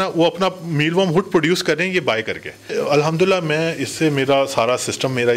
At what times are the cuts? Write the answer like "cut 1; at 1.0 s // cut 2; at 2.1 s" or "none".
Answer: cut 1; at 2.7 s